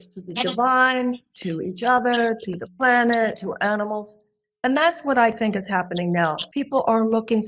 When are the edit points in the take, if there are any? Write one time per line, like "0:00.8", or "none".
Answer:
0:06.4